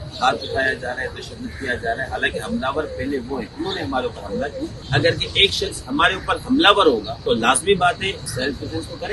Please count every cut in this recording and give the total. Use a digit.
3